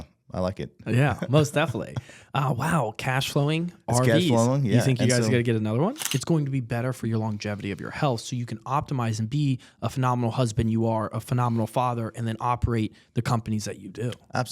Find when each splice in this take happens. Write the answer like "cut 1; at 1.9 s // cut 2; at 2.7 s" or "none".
cut 1; at 6.1 s

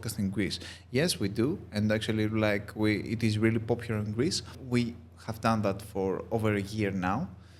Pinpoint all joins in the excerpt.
cut 1; at 4.6 s

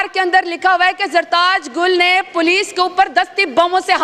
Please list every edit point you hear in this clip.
none

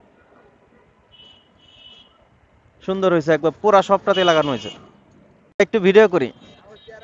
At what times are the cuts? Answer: cut 1; at 5.6 s

